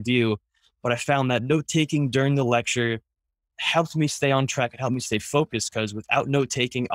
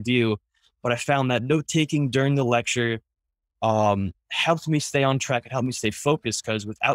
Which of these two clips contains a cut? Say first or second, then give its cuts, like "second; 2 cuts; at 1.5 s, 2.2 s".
first; 1 cut; at 3.4 s